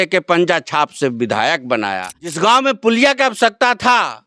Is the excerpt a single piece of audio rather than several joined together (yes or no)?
no